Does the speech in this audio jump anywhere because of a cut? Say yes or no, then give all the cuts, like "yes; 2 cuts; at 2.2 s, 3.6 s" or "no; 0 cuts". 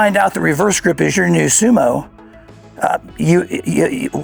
no; 0 cuts